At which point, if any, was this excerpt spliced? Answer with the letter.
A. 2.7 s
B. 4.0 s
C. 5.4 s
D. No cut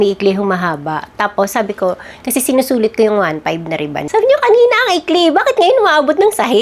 B